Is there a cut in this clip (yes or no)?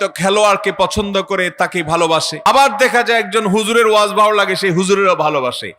yes